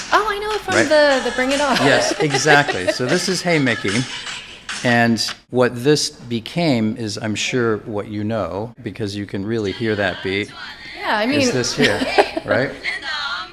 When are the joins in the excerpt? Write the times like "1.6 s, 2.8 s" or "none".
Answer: none